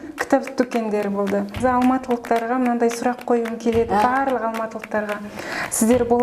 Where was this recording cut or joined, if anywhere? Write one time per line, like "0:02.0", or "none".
0:01.6